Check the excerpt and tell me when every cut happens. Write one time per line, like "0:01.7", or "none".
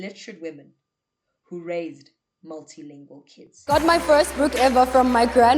0:03.6